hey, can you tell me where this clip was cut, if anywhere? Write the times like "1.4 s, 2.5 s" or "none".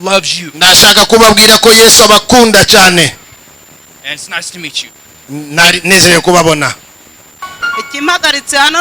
7.4 s